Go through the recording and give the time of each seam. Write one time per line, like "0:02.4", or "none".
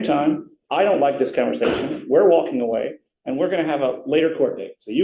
none